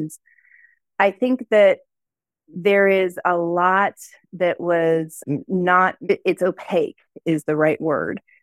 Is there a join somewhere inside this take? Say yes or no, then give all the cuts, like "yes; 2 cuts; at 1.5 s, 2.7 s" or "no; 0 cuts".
no; 0 cuts